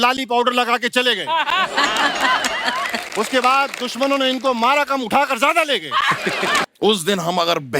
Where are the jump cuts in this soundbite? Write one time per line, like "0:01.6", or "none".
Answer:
0:06.7